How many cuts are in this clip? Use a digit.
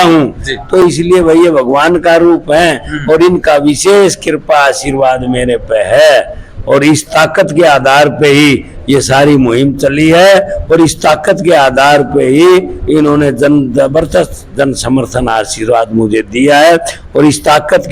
0